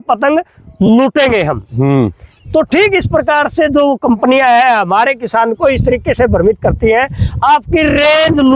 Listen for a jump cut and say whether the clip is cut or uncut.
uncut